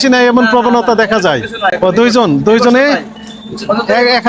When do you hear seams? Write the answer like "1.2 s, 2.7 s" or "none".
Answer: 1.8 s